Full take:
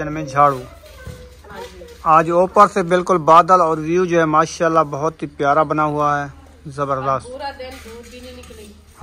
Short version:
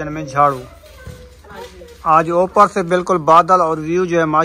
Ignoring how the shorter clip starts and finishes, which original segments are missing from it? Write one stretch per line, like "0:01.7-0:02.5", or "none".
none